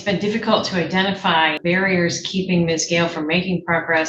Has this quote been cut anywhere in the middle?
no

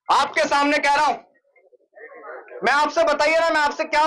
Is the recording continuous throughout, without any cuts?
no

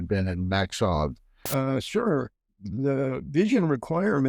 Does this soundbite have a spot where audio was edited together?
yes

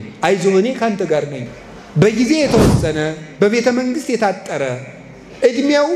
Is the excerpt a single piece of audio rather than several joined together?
yes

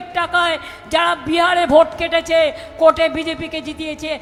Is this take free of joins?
yes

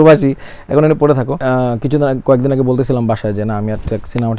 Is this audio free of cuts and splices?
no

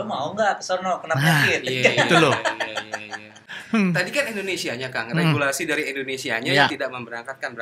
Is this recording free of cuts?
no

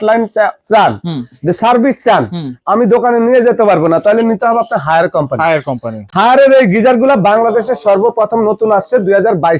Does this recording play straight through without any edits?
yes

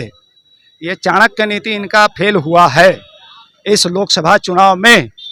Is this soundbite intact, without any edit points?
yes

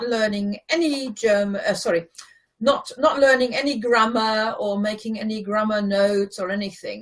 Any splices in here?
yes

